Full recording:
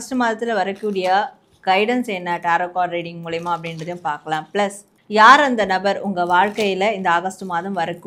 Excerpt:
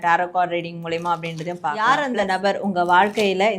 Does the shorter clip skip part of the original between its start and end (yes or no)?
yes